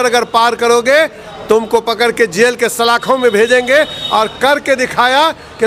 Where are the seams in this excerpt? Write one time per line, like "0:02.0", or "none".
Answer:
none